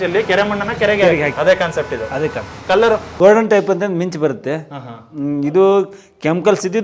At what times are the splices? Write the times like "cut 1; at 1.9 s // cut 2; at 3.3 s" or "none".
cut 1; at 1.3 s // cut 2; at 3.1 s